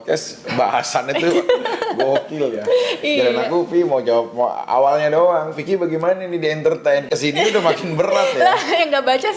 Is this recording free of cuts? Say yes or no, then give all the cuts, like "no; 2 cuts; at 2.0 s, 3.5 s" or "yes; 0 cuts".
yes; 0 cuts